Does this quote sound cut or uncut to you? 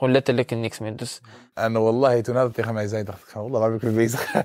cut